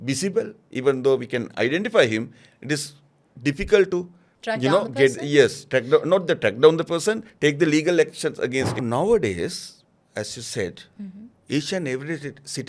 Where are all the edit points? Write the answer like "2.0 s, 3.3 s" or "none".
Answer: 8.8 s